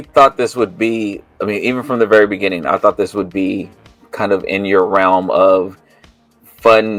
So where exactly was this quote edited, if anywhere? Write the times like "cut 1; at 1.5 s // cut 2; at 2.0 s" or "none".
none